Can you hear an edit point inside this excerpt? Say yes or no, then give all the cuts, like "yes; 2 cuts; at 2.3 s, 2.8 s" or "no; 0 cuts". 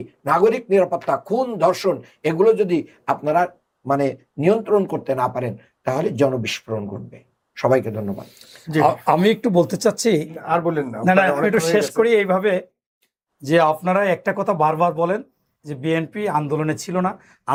no; 0 cuts